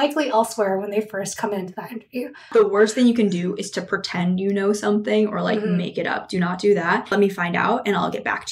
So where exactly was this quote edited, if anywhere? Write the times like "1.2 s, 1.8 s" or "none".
2.5 s, 7.1 s